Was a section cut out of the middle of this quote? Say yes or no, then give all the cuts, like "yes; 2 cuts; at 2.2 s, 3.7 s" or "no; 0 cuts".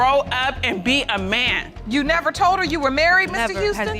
yes; 1 cut; at 1.7 s